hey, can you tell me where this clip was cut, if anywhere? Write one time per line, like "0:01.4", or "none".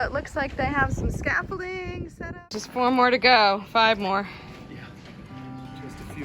0:02.5

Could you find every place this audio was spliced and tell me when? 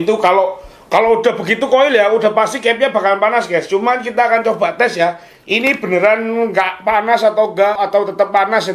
0:07.8

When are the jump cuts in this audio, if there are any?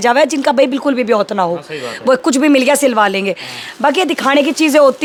none

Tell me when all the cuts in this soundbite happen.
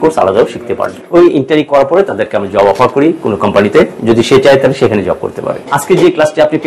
0:01.0
0:05.6

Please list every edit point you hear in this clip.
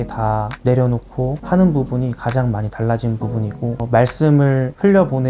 0:01.4
0:03.8

